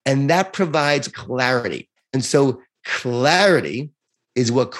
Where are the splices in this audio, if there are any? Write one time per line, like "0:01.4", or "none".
0:01.2